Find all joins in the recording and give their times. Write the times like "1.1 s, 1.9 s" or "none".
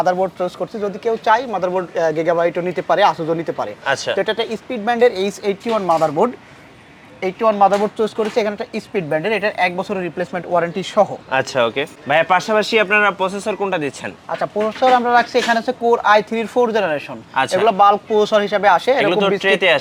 none

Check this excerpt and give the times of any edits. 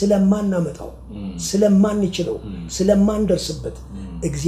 none

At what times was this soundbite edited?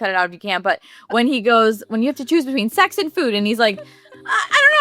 none

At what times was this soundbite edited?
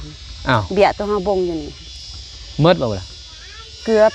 none

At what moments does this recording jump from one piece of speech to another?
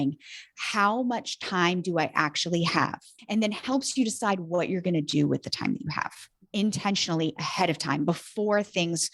3.1 s

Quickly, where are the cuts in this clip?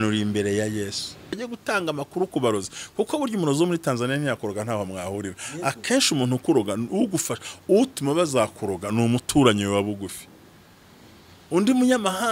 1.4 s

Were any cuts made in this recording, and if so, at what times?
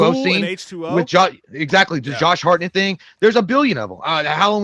none

